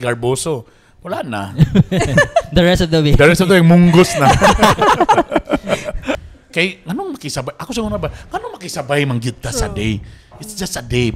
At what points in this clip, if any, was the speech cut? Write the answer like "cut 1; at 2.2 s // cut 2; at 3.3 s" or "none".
cut 1; at 6.3 s